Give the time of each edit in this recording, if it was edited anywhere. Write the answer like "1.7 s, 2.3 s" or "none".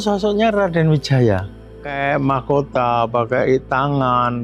1.9 s